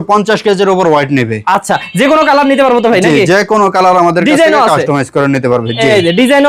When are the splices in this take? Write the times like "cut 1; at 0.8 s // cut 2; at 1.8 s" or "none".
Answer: none